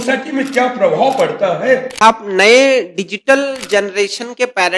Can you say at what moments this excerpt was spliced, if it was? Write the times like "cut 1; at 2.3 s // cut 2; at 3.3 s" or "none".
cut 1; at 2.0 s